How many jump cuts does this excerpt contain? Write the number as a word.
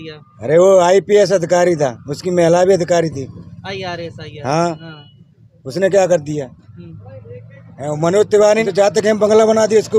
one